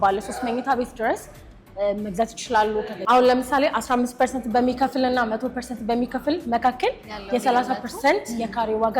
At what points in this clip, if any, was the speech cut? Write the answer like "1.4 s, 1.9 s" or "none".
2.9 s